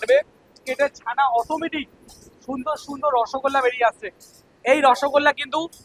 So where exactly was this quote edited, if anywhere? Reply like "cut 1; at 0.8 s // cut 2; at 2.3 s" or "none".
none